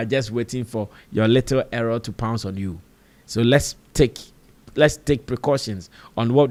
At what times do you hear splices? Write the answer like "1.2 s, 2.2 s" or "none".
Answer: none